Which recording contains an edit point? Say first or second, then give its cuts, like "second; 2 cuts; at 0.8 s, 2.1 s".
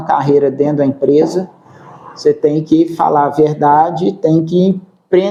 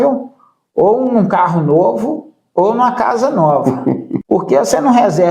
second; 1 cut; at 4.1 s